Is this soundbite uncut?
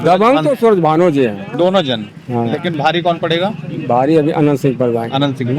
yes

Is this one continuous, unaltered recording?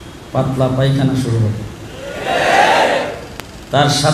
yes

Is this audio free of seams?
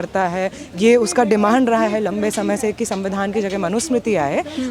yes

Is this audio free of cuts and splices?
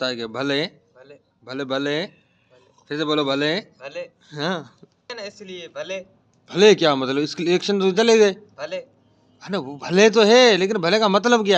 no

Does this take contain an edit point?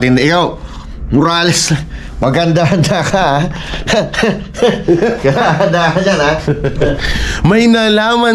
yes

